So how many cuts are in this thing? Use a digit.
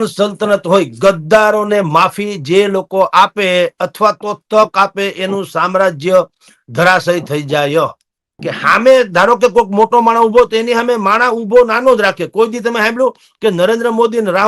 1